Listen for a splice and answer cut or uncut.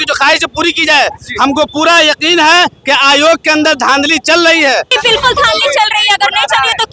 cut